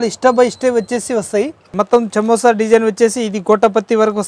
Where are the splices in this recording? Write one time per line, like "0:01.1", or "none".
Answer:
0:01.7